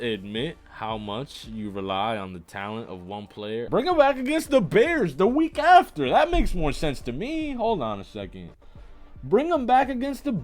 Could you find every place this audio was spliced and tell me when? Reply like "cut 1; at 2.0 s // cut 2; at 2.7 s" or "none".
cut 1; at 3.7 s